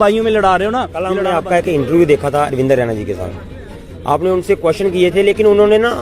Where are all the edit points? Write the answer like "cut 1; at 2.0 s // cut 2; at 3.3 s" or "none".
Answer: cut 1; at 1.2 s